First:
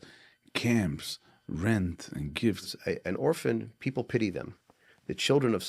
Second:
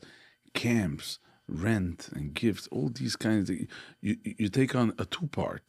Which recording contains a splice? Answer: first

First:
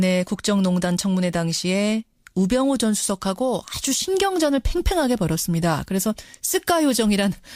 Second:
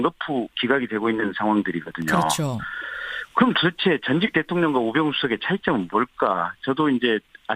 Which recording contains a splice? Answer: second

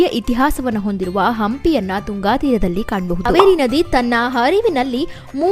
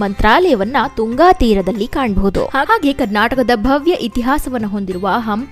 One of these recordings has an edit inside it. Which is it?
first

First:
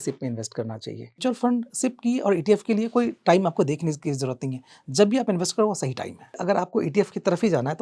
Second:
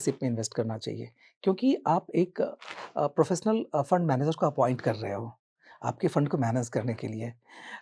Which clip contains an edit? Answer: first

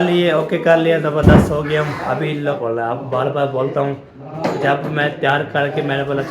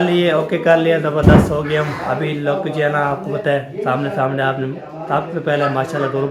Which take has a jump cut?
first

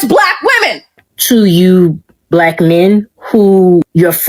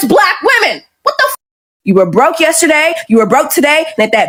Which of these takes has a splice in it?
first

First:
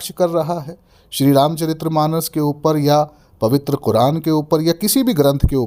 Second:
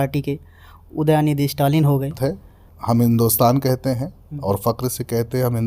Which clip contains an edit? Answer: second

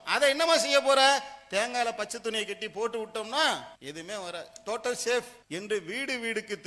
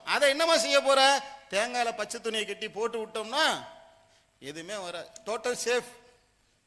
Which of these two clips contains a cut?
first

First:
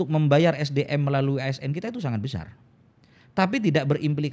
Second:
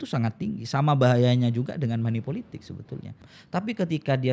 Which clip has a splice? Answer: second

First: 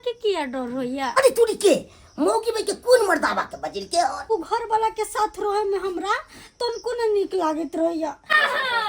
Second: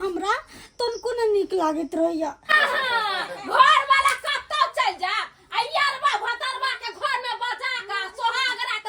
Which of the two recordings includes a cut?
first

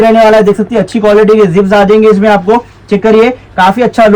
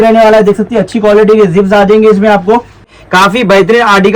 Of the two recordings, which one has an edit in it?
second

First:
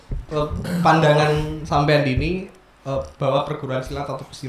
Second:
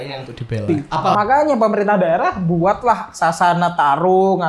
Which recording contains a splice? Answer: second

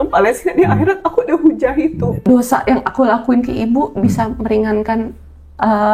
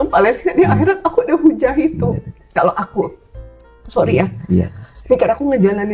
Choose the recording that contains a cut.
first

